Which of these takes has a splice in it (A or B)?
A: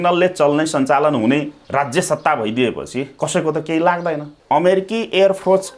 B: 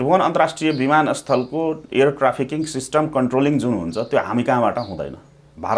A